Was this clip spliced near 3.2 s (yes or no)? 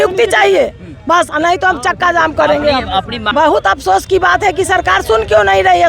yes